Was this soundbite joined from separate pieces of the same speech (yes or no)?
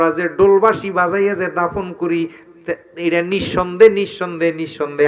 no